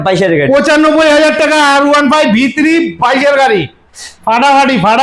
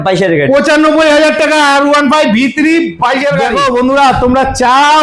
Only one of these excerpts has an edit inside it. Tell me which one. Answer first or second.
second